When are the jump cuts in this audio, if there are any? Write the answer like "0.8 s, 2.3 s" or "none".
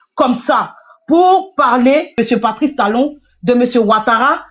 2.2 s